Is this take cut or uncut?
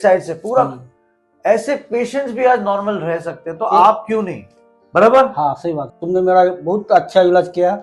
cut